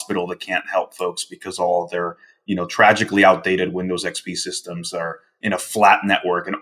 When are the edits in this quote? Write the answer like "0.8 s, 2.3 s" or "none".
none

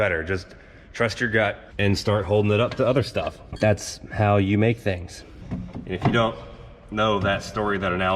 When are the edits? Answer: 1.7 s, 5.4 s

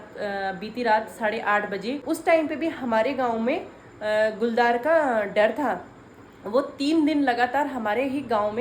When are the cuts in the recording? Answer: 2.0 s

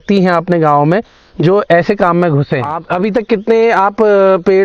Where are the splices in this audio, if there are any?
2.8 s

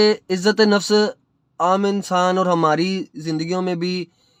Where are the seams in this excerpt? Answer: none

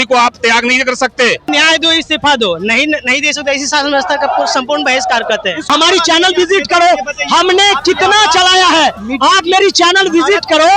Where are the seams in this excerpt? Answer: 1.5 s, 5.6 s

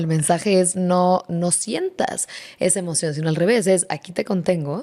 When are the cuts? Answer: none

